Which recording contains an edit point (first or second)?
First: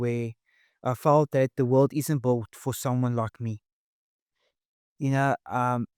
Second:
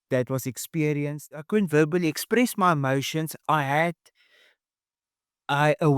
second